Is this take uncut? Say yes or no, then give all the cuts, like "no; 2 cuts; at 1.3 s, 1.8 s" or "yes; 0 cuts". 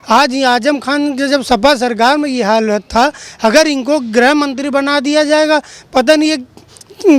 yes; 0 cuts